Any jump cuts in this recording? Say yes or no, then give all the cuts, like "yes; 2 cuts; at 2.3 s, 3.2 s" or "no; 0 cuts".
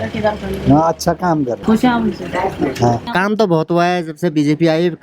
yes; 2 cuts; at 1.6 s, 3.1 s